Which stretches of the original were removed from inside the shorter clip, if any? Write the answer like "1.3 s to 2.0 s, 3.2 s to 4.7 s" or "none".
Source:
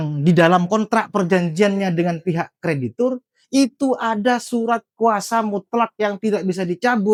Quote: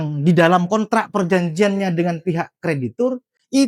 none